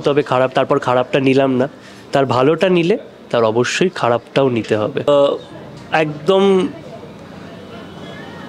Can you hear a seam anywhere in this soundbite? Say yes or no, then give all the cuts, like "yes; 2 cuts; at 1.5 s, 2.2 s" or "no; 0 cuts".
yes; 1 cut; at 5.1 s